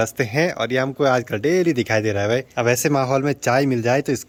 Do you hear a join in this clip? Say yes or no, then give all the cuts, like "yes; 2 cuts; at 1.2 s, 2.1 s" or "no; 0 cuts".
no; 0 cuts